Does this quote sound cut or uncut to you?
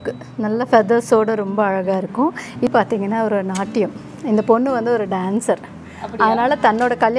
cut